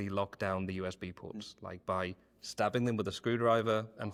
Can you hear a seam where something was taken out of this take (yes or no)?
no